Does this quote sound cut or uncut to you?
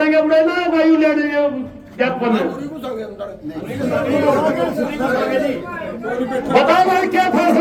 uncut